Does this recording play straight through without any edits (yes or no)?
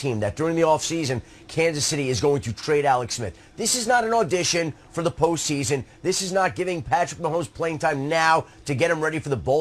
no